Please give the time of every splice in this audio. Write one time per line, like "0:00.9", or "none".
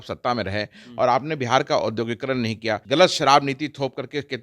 0:02.8